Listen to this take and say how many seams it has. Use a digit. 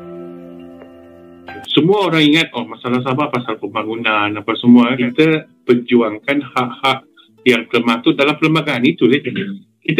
2